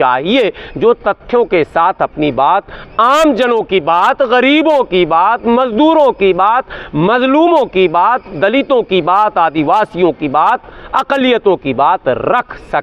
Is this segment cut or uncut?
uncut